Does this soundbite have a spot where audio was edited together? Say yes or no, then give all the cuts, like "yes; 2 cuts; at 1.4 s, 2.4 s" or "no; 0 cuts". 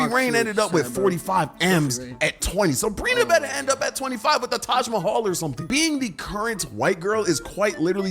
yes; 1 cut; at 5.6 s